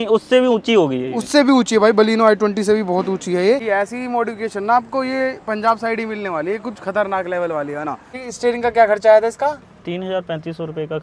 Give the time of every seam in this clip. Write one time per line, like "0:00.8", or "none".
0:03.6
0:08.2